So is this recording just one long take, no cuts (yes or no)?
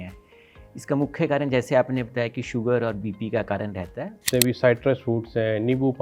no